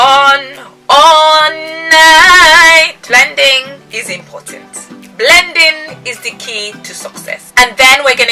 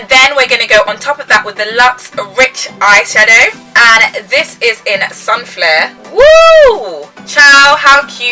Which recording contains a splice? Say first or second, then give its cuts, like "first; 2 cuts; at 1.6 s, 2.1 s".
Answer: first; 1 cut; at 3.0 s